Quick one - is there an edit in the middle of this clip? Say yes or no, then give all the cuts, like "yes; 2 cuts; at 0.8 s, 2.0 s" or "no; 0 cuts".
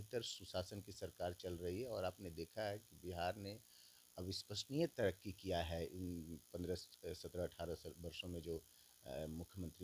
no; 0 cuts